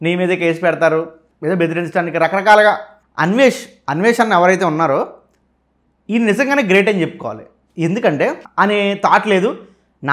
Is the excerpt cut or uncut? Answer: cut